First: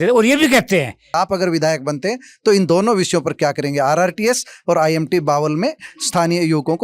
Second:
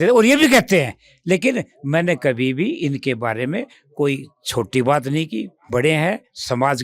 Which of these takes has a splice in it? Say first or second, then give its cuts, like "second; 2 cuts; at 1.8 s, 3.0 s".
first; 1 cut; at 1.1 s